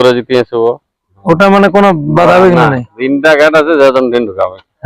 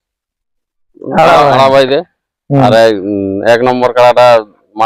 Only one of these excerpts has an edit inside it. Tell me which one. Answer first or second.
first